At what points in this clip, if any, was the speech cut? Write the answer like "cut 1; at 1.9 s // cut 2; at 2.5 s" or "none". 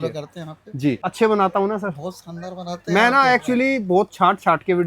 cut 1; at 1.0 s